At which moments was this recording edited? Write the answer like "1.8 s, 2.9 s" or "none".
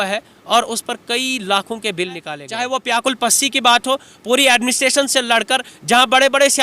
2.4 s

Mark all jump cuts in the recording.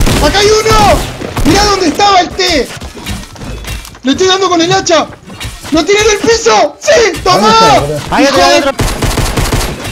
2.3 s, 8.7 s

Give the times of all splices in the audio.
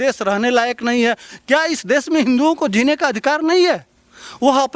1.3 s

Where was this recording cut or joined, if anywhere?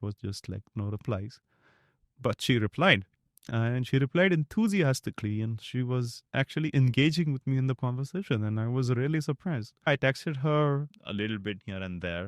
9.9 s, 11.0 s

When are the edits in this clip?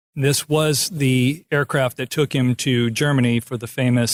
none

